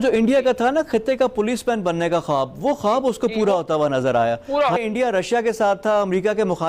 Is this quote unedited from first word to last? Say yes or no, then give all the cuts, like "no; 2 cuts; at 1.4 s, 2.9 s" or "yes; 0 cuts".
no; 1 cut; at 4.8 s